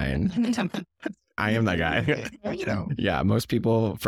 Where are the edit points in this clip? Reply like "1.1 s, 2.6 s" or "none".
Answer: 1.4 s, 2.9 s